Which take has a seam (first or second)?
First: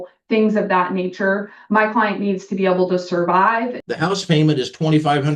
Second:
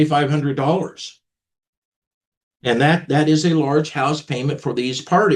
first